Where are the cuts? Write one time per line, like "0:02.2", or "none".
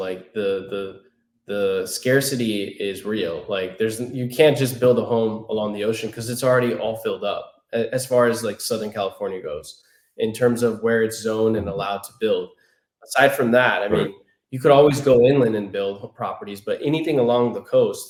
none